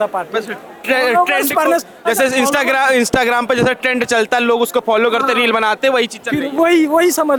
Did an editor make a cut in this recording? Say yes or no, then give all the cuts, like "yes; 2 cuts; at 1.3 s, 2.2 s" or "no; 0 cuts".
no; 0 cuts